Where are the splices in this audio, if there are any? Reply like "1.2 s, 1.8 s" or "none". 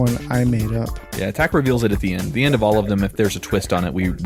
none